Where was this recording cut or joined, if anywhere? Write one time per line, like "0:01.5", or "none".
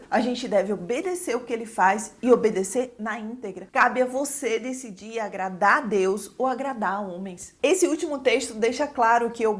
0:03.6
0:07.5